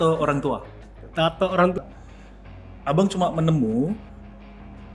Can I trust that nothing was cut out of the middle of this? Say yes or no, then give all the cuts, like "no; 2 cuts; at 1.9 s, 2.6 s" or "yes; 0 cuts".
no; 1 cut; at 1.8 s